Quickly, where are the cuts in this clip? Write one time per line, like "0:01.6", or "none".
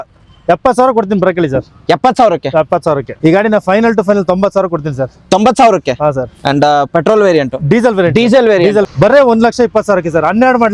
0:03.1
0:08.8